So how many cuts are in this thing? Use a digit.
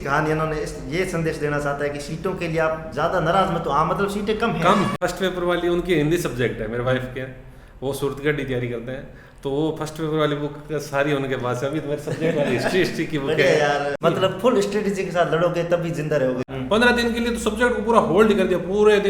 3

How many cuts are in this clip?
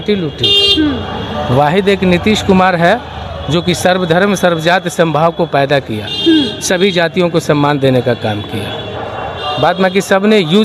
0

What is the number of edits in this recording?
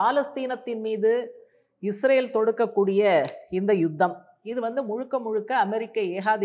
0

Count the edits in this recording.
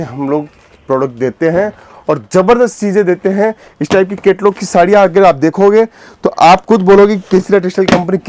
0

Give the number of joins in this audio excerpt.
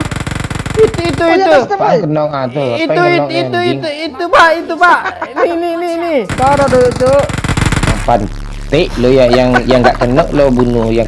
2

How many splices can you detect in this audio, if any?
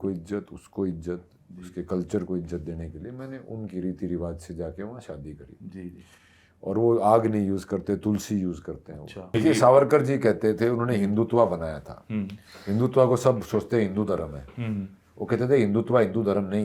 1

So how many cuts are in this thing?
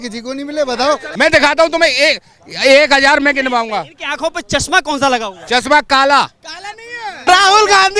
2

